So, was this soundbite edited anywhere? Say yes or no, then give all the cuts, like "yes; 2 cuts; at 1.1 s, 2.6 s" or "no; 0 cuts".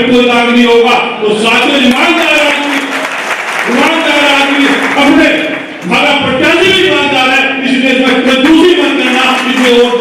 no; 0 cuts